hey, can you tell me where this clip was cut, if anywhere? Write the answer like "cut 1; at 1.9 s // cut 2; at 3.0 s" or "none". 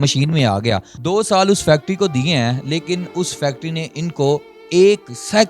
cut 1; at 0.9 s // cut 2; at 4.5 s